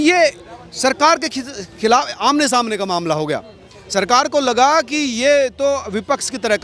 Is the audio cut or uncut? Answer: uncut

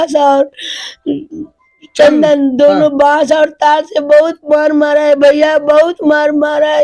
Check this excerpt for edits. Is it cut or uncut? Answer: uncut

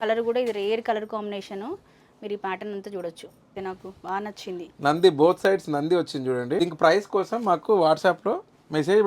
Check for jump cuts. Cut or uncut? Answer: cut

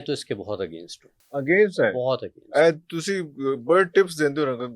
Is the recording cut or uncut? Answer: uncut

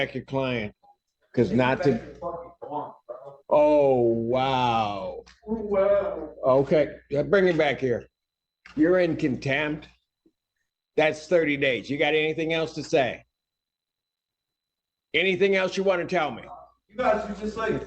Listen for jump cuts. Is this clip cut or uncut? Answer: uncut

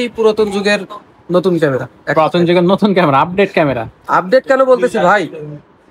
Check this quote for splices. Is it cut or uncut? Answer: uncut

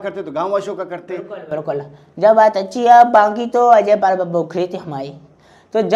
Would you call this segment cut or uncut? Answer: uncut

